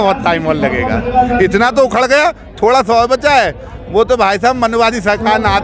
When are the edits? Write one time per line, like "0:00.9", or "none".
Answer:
none